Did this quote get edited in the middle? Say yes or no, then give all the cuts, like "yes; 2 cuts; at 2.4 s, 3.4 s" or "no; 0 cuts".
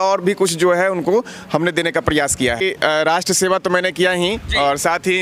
yes; 1 cut; at 2.6 s